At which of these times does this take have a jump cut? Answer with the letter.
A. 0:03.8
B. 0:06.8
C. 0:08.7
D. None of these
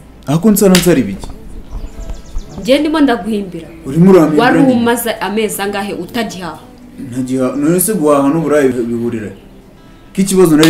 C